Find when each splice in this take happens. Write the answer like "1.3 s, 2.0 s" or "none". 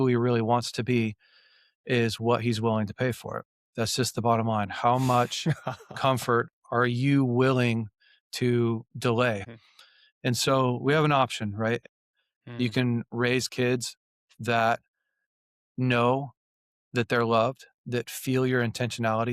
9.4 s, 11.8 s